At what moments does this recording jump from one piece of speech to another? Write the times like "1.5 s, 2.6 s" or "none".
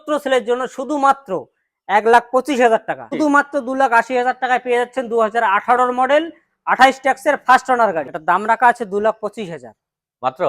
3.1 s, 8.1 s